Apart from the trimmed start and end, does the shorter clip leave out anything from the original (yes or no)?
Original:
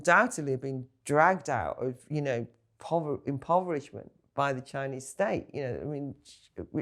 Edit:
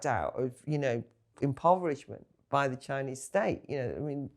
yes